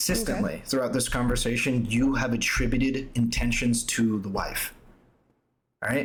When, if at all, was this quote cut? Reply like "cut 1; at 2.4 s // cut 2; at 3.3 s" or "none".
none